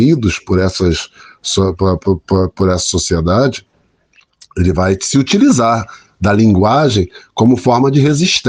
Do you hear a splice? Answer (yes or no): no